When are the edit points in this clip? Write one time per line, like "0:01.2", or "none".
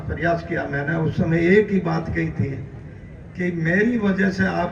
none